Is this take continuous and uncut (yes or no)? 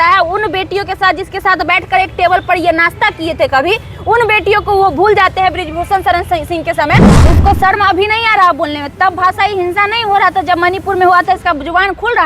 no